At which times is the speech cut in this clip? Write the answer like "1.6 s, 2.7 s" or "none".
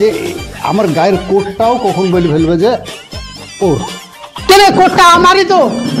none